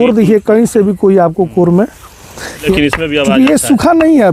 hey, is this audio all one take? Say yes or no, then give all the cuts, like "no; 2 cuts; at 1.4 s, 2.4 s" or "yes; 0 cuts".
no; 1 cut; at 2.7 s